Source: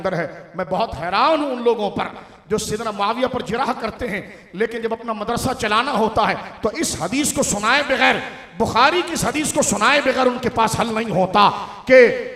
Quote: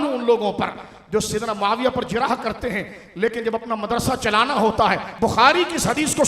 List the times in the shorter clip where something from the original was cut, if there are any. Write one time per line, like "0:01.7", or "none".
0:05.1